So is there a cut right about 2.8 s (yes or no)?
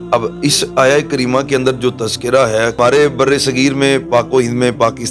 yes